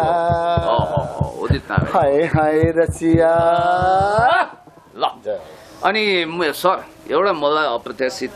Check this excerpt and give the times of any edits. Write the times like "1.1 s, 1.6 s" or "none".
none